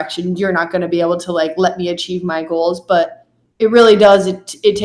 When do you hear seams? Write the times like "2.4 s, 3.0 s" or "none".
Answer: none